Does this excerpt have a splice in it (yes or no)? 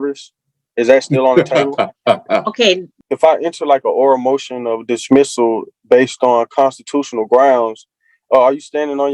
yes